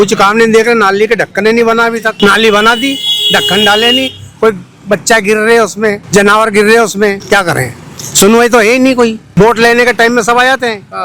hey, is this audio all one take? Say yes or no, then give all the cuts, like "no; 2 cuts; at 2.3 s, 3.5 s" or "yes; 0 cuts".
no; 4 cuts; at 2.1 s, 6.0 s, 7.2 s, 9.2 s